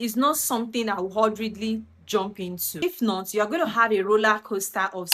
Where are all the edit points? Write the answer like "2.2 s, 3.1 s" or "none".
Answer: 2.8 s